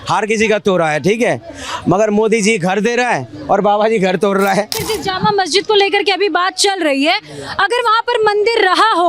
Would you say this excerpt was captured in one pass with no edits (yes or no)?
no